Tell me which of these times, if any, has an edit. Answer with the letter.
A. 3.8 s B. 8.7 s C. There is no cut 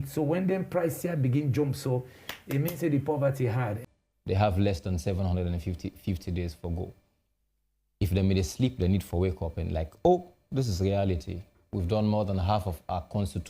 A